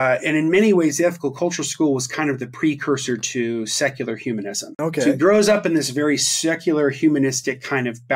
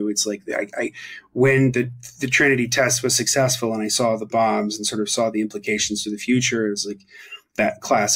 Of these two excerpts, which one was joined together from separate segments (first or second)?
first